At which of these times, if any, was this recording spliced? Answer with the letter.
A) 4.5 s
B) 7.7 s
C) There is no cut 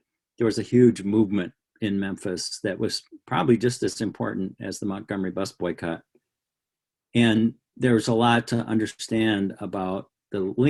B